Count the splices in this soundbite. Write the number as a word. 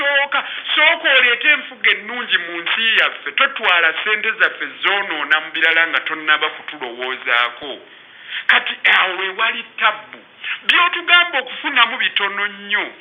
zero